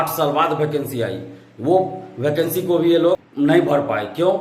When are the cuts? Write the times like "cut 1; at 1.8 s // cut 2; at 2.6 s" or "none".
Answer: cut 1; at 3.3 s